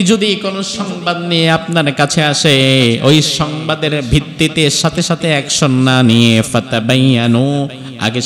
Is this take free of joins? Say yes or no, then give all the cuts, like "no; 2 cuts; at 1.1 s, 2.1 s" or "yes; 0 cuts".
yes; 0 cuts